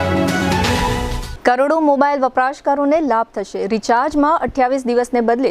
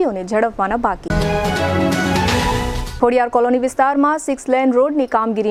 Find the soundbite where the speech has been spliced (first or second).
first